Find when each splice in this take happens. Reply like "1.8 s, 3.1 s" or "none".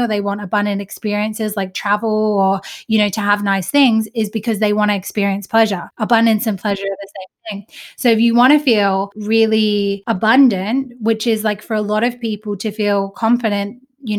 5.9 s, 9.1 s, 10.0 s